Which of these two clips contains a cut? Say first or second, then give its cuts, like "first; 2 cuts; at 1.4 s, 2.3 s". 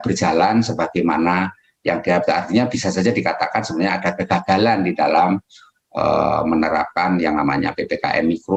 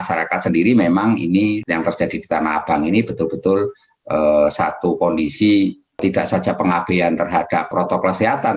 second; 3 cuts; at 1.6 s, 6.0 s, 7.7 s